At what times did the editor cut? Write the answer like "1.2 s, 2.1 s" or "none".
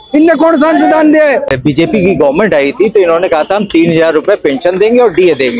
1.5 s